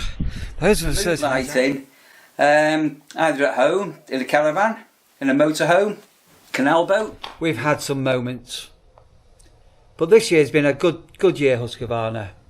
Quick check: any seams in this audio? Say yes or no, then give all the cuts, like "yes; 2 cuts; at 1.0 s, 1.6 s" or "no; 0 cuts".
yes; 2 cuts; at 1.2 s, 7.2 s